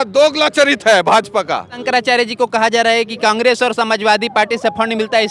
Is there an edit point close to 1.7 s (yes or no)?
yes